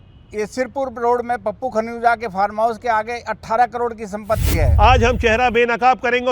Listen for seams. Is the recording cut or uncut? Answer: cut